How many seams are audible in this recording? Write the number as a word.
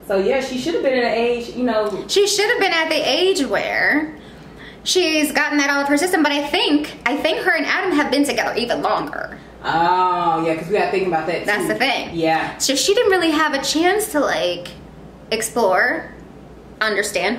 zero